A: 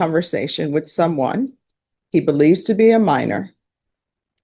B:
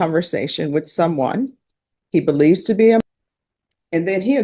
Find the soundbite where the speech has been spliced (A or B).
B